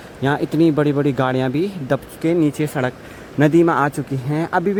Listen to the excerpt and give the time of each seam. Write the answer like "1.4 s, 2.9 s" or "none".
none